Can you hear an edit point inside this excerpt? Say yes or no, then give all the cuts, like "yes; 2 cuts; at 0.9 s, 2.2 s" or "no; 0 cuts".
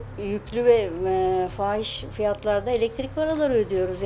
no; 0 cuts